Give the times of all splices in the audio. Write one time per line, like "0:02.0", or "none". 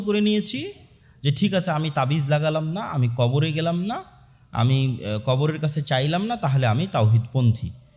none